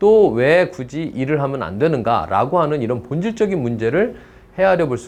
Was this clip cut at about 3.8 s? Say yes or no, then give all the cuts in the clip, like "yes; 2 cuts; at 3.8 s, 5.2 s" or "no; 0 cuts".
no; 0 cuts